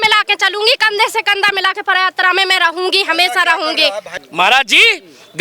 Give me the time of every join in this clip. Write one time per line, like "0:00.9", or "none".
0:04.2